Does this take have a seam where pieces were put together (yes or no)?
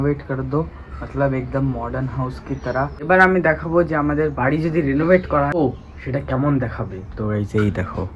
yes